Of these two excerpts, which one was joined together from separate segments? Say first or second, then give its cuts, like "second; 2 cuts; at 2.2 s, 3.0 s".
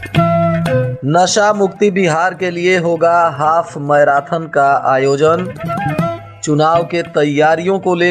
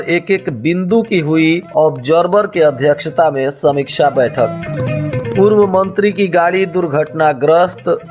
first; 1 cut; at 0.9 s